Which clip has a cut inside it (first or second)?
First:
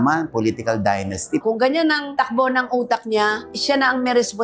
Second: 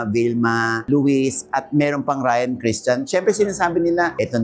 first